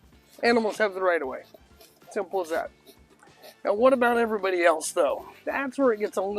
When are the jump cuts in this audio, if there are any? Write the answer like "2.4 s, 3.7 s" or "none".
none